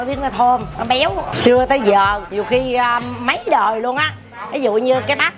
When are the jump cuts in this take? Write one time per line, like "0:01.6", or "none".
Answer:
0:01.0
0:02.3